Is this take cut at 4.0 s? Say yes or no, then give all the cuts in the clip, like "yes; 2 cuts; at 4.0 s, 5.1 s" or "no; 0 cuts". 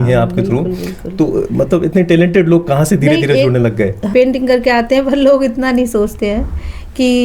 yes; 1 cut; at 4.0 s